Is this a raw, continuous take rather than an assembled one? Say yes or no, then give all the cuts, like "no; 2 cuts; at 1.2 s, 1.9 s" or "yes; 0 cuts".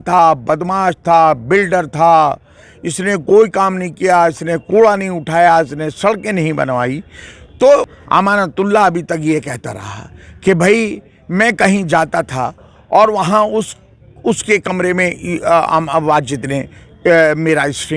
no; 1 cut; at 8.0 s